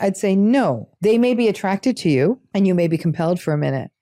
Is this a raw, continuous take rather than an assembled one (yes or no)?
no